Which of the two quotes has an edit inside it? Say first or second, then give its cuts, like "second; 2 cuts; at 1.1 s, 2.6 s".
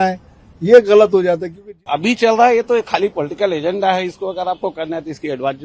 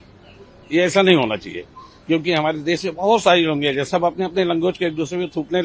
first; 1 cut; at 1.8 s